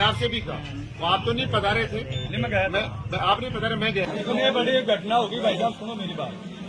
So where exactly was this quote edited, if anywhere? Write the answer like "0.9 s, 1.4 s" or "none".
4.1 s